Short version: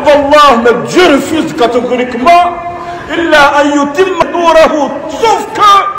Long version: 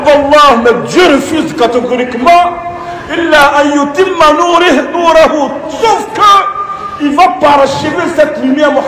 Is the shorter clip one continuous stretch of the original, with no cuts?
no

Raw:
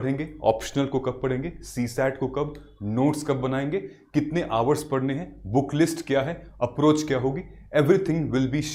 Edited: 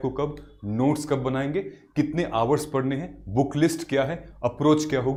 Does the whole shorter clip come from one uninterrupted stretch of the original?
yes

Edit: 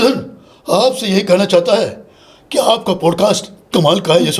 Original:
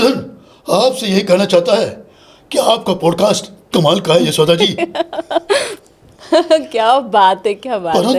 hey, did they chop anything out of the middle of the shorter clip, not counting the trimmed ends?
no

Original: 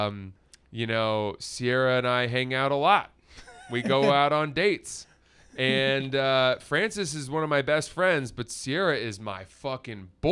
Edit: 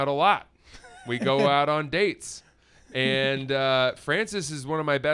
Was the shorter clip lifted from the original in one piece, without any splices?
yes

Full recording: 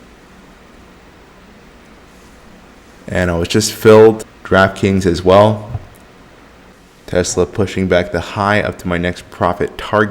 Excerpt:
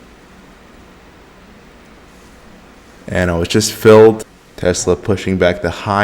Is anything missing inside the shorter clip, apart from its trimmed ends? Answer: yes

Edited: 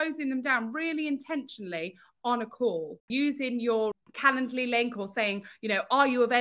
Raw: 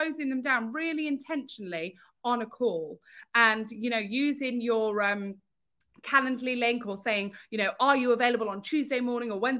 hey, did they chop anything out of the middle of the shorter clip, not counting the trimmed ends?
yes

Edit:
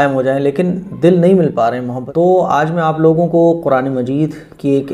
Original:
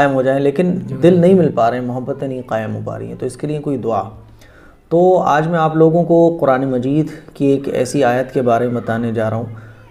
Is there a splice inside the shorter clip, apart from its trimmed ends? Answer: yes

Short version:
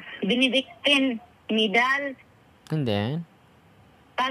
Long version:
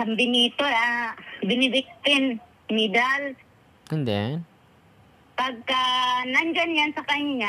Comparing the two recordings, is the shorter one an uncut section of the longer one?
yes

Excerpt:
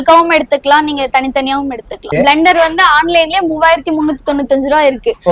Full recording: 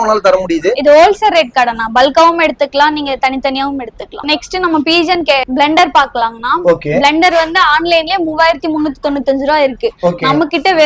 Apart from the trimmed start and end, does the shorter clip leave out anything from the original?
yes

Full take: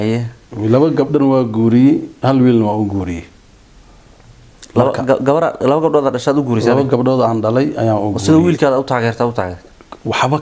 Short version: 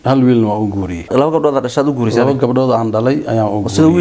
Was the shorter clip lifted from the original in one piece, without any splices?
no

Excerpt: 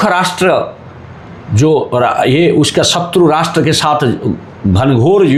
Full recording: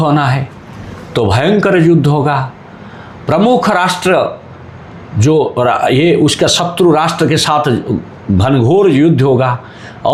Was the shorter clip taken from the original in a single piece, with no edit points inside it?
yes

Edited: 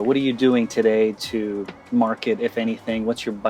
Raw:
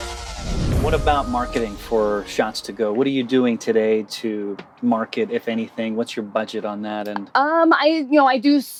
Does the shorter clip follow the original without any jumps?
yes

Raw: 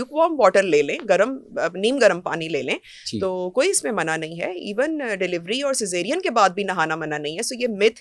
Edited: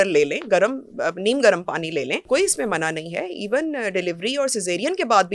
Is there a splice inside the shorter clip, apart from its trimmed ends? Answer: yes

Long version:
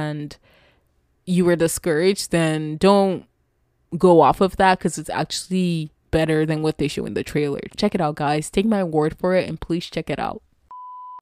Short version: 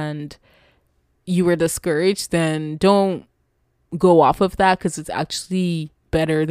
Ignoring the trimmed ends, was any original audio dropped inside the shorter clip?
no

